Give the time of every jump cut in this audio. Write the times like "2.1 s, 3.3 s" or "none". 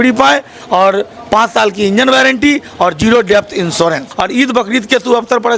4.1 s